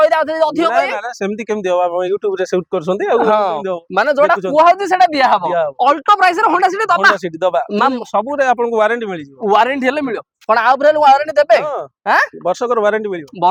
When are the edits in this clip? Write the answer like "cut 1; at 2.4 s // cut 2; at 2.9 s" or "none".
none